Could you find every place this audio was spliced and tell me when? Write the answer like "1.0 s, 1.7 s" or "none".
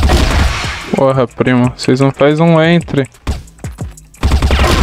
none

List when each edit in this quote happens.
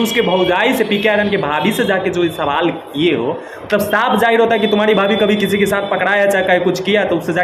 none

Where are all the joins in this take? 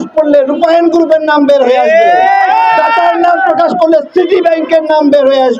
none

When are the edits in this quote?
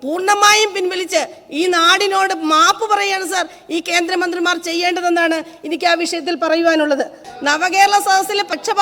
7.3 s

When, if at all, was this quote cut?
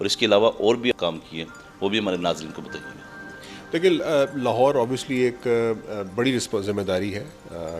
0.9 s

